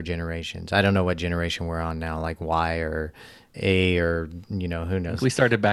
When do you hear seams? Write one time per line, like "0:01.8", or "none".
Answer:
none